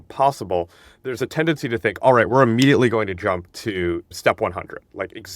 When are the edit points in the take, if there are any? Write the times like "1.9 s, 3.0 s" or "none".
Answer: 4.1 s